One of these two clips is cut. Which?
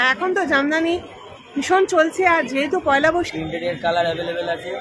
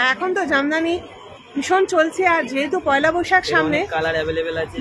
first; 1 cut; at 3.3 s

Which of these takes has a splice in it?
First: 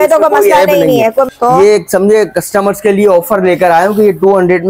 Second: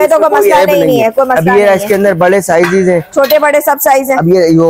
first; 1 cut; at 1.3 s

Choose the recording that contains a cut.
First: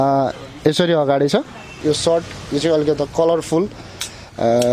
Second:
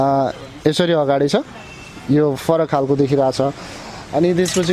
first; 1 cut; at 1.7 s

